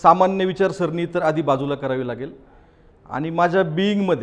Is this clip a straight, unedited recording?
yes; 0 cuts

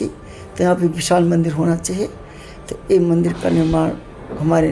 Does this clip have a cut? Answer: no; 0 cuts

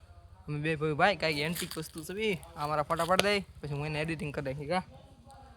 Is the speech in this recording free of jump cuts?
yes; 0 cuts

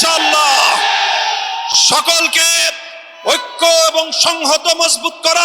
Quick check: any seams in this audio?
no; 0 cuts

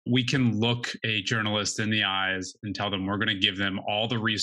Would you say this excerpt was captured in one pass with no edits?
no; 1 cut; at 0.9 s

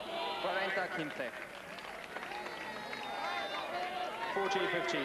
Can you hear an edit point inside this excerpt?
no; 0 cuts

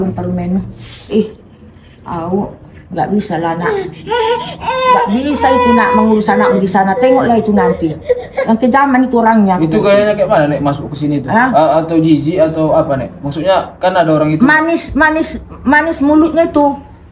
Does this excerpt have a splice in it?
no; 0 cuts

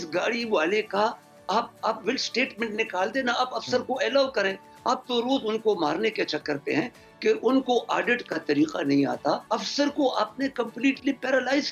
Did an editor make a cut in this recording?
yes; 1 cut; at 9.4 s

